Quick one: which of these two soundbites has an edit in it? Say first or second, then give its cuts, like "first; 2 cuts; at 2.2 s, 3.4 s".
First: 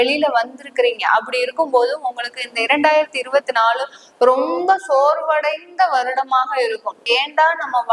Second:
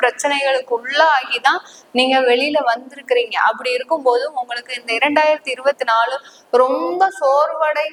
first; 1 cut; at 7.0 s